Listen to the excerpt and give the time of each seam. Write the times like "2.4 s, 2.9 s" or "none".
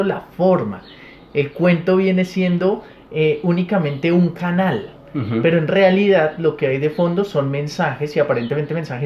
none

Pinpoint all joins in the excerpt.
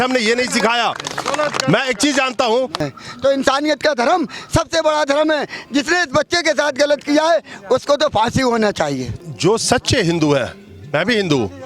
2.8 s, 9.2 s

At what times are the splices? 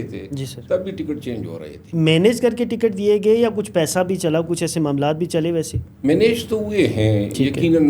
1.9 s, 5.8 s

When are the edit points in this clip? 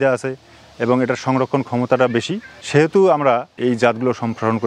3.5 s

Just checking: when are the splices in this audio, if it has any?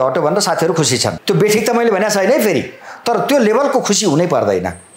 1.2 s

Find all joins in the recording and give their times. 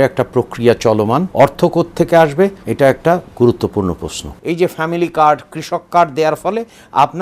1.3 s, 2.6 s, 4.3 s

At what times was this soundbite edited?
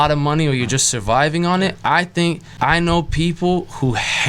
2.5 s

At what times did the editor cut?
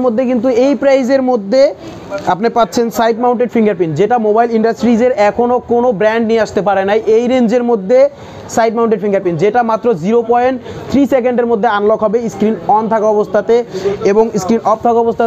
none

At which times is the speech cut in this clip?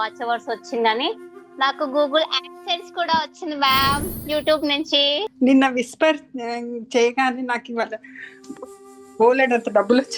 5.3 s

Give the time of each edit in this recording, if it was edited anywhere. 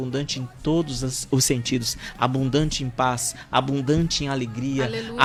none

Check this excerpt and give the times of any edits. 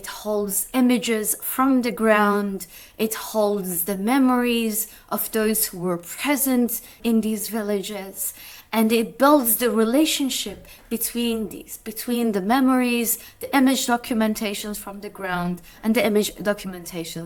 none

